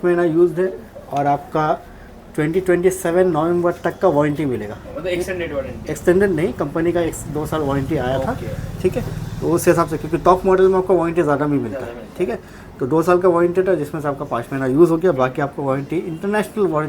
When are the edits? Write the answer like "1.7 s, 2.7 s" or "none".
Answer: none